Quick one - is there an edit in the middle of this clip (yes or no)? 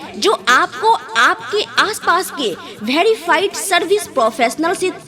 no